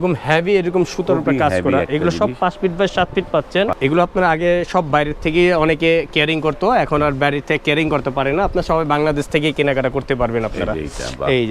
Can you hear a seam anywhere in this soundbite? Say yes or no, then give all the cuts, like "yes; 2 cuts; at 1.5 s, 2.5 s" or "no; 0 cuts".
yes; 1 cut; at 3.8 s